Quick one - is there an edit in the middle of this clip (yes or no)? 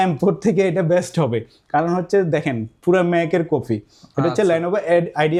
no